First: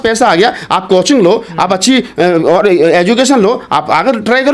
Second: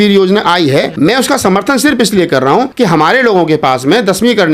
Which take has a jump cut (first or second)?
second